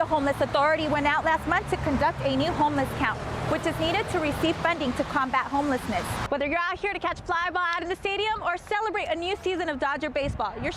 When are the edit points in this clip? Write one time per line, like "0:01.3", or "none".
0:06.2